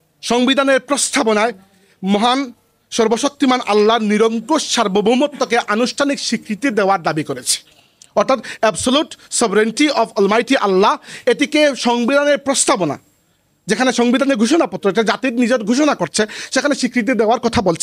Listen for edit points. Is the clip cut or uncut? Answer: uncut